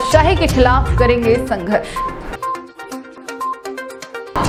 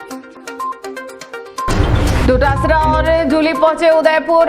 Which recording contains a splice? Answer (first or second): second